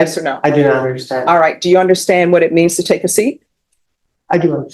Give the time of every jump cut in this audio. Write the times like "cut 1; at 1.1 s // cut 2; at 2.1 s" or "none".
none